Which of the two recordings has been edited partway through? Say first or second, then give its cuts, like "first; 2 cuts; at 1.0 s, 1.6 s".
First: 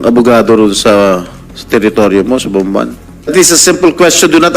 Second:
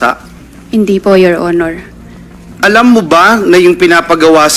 first; 1 cut; at 3.3 s